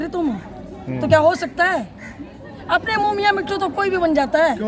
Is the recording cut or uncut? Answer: uncut